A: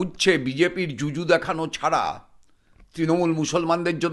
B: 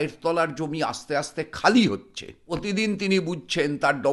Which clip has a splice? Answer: B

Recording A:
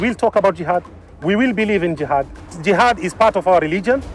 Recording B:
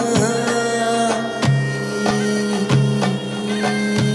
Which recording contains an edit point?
A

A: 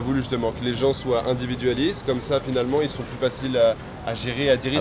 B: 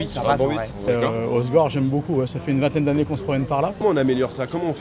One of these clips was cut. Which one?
B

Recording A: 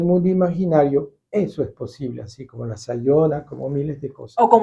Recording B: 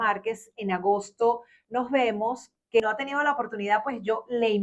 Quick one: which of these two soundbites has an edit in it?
B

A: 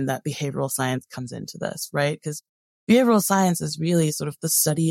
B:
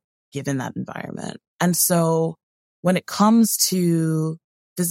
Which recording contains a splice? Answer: B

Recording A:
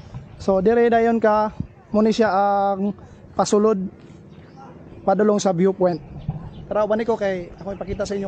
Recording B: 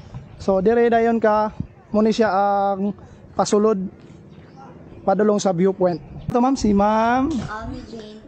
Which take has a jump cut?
B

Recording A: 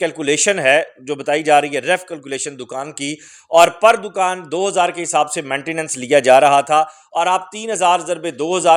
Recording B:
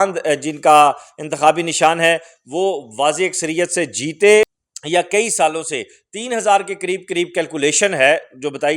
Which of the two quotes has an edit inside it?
B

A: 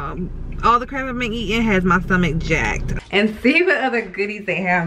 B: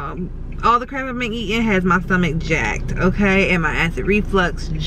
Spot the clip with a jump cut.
A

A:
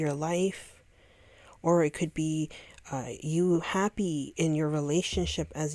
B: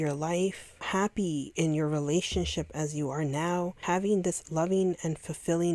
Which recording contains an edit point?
B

